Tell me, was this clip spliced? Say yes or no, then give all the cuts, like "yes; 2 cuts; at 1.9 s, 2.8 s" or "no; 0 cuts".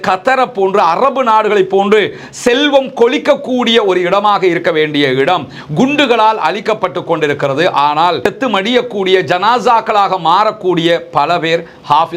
no; 0 cuts